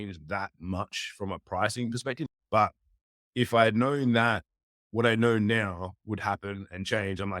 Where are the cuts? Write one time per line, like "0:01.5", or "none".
0:02.3